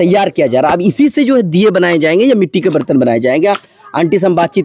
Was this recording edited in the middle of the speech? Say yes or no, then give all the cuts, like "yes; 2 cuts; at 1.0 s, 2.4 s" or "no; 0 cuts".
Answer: no; 0 cuts